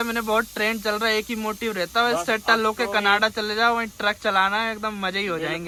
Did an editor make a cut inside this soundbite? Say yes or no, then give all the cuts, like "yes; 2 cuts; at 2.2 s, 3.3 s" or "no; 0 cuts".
no; 0 cuts